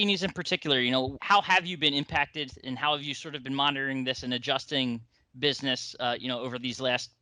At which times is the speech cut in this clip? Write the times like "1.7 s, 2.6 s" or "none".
1.2 s